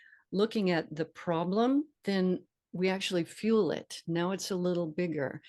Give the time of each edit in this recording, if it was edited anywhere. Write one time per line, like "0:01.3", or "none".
0:01.9